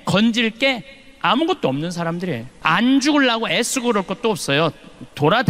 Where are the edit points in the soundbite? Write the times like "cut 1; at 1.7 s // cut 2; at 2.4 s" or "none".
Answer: cut 1; at 2.5 s